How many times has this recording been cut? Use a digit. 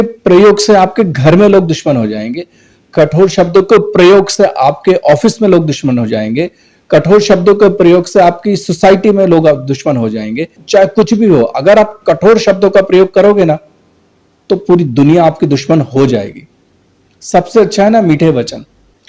1